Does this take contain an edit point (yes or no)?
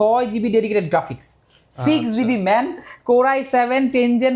no